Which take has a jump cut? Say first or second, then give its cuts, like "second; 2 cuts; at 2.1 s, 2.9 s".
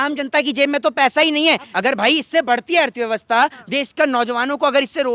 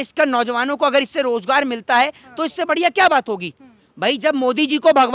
first; 1 cut; at 1.7 s